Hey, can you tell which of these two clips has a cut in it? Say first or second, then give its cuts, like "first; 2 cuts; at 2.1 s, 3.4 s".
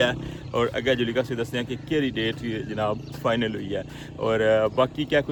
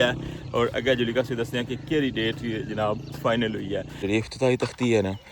second; 1 cut; at 4.1 s